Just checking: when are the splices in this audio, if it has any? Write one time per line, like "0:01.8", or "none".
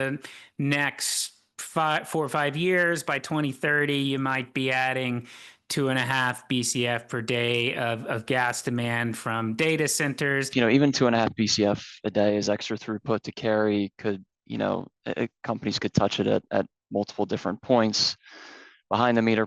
0:10.5